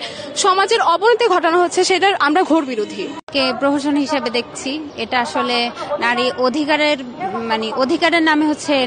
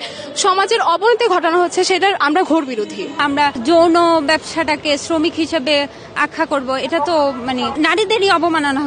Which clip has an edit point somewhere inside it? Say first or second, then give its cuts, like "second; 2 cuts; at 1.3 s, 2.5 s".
second; 2 cuts; at 3.3 s, 7.7 s